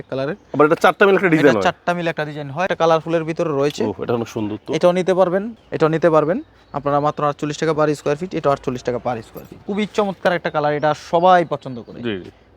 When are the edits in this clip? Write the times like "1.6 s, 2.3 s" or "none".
2.7 s, 5.5 s, 9.6 s